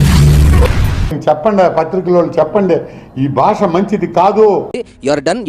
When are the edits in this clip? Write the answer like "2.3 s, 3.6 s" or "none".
1.2 s, 4.7 s